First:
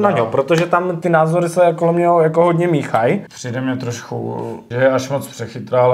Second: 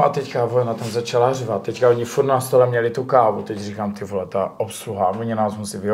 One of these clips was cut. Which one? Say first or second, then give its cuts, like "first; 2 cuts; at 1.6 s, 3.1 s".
first; 3 cuts; at 1.0 s, 3.4 s, 4.6 s